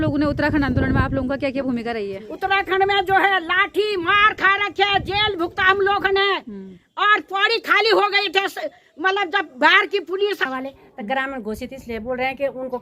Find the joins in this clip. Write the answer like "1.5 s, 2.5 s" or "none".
10.4 s